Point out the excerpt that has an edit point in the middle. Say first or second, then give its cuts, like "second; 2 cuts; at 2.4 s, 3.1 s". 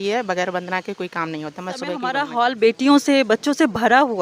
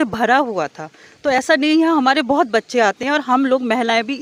first; 1 cut; at 2.1 s